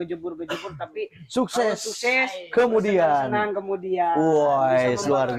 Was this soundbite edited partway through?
no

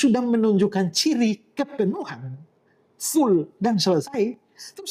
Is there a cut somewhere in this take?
no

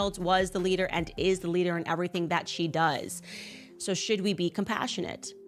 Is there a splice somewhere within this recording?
no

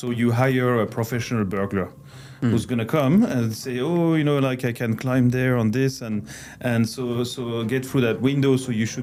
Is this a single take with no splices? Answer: yes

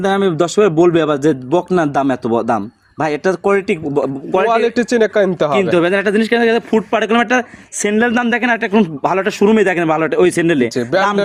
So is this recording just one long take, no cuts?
yes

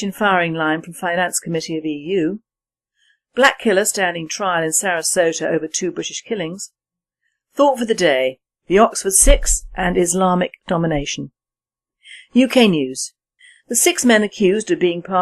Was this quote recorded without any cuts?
no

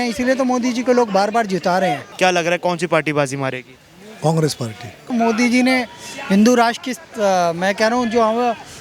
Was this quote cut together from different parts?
yes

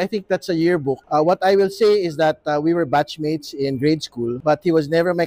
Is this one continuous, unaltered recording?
no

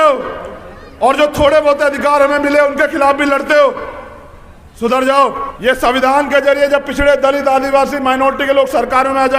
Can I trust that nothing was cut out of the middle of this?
no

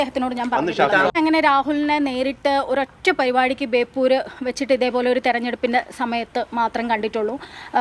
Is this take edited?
yes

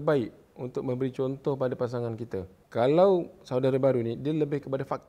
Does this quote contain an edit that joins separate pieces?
yes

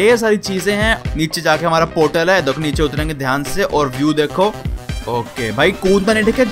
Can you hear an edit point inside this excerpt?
yes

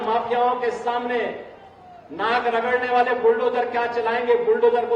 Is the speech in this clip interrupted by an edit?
no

